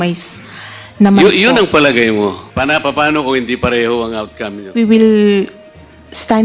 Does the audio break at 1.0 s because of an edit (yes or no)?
no